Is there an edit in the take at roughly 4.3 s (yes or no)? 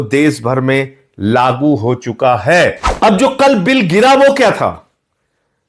no